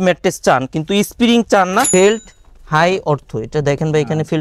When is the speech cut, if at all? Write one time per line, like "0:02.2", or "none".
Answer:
0:01.9

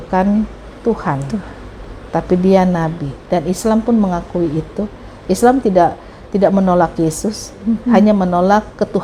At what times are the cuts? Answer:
none

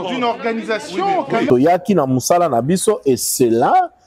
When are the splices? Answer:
0:01.5

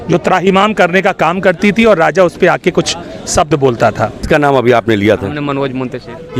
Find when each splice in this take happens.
0:04.2

